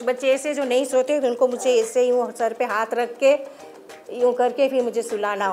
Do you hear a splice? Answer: no; 0 cuts

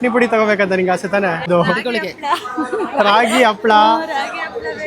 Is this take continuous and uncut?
no; 1 cut; at 1.5 s

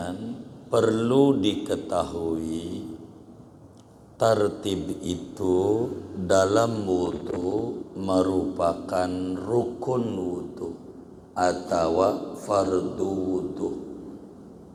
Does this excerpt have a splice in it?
no; 0 cuts

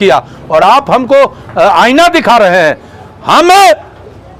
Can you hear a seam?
no; 0 cuts

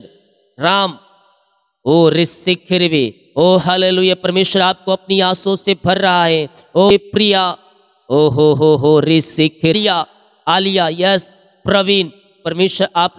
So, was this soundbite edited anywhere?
yes; 2 cuts; at 6.9 s, 9.7 s

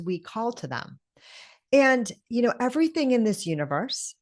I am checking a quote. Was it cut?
no; 0 cuts

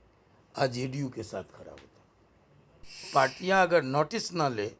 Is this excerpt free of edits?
no; 1 cut; at 3.1 s

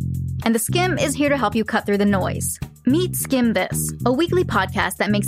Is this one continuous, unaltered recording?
yes; 0 cuts

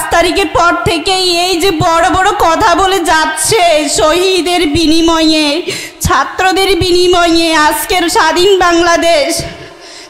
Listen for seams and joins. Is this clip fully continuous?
yes; 0 cuts

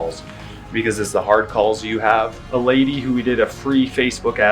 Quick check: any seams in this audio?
yes; 1 cut; at 2.4 s

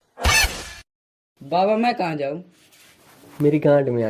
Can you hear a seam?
no; 0 cuts

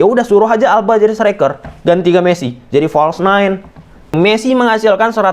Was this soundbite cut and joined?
yes; 1 cut; at 4.1 s

